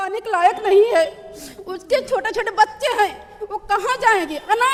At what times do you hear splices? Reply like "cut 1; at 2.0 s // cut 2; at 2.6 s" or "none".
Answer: none